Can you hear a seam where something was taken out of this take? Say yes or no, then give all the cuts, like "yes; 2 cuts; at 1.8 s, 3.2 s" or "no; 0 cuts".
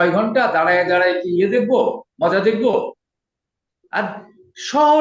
no; 0 cuts